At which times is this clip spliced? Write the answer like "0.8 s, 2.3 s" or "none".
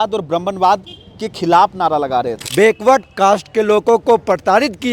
2.4 s